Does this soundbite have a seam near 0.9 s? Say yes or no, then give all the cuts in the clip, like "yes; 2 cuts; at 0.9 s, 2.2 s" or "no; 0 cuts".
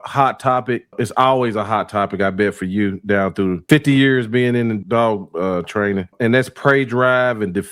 yes; 4 cuts; at 0.9 s, 3.6 s, 4.8 s, 6.1 s